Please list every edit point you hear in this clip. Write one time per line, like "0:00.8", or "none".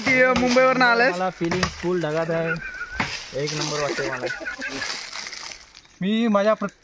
0:04.9